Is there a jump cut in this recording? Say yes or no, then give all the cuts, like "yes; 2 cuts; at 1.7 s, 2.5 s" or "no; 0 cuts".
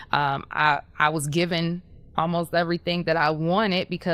no; 0 cuts